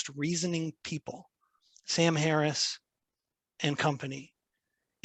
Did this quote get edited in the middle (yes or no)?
no